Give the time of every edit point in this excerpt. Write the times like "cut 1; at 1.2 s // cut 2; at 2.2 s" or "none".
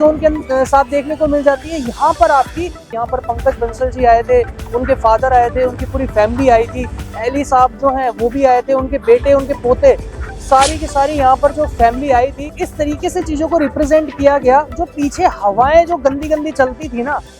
cut 1; at 3.0 s // cut 2; at 12.4 s